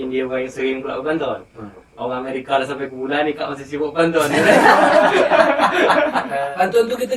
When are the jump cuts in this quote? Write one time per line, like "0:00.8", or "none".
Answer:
0:06.2